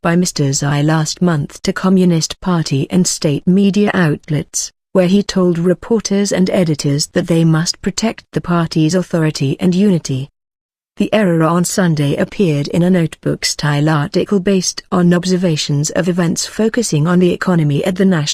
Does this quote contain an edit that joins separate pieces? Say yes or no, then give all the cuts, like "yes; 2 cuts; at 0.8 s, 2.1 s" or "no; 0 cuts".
no; 0 cuts